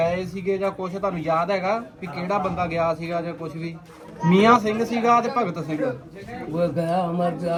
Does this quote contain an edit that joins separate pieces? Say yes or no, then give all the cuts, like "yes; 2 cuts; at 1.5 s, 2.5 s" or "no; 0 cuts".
no; 0 cuts